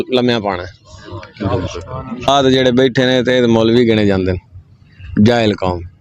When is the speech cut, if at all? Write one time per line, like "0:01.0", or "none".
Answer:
0:02.3